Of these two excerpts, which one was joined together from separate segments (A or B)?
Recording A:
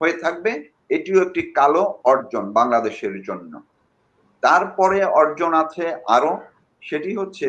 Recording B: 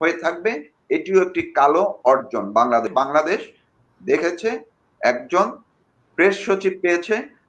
B